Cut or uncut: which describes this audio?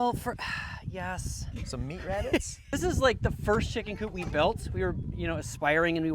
cut